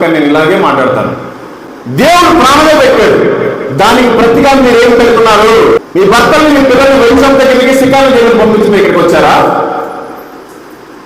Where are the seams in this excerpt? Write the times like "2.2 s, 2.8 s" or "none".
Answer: 1.7 s, 5.8 s